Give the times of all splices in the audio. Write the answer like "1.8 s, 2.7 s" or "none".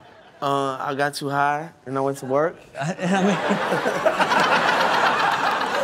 3.9 s